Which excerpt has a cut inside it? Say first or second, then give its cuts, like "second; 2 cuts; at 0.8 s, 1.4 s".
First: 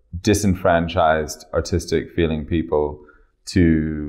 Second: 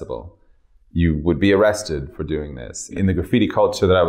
second; 1 cut; at 3.0 s